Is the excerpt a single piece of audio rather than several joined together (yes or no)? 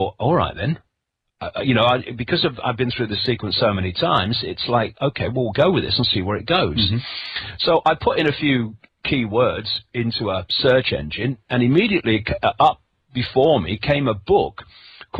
yes